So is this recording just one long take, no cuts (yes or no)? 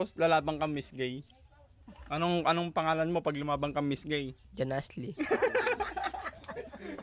no